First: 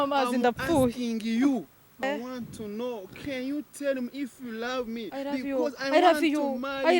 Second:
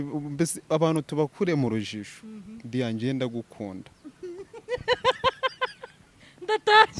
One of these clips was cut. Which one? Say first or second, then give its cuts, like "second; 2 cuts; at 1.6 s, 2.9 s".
first; 1 cut; at 2.0 s